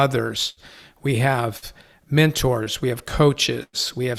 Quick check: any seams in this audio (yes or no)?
no